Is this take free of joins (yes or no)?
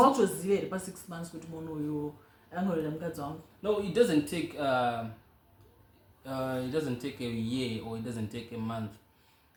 yes